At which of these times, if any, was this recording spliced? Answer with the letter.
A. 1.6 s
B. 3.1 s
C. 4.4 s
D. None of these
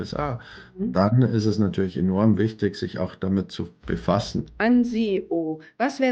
C